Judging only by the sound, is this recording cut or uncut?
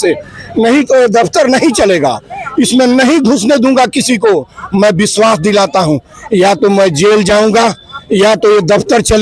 uncut